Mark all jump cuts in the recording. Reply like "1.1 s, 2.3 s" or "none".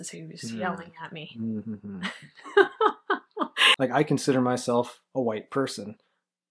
3.6 s